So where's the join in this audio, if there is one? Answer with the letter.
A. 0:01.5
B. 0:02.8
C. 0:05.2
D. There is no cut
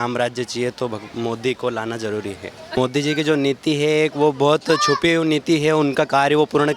B